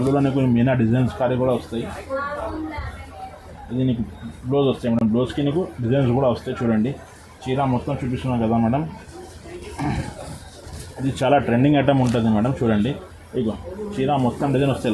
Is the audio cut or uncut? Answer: uncut